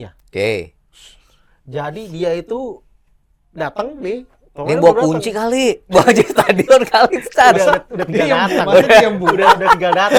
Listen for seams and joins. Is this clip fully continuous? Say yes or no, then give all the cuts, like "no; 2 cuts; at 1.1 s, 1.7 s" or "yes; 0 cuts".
yes; 0 cuts